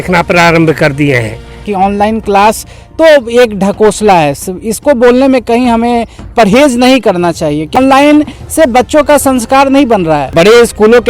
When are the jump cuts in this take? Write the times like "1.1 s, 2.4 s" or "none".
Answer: 1.7 s, 7.8 s, 10.3 s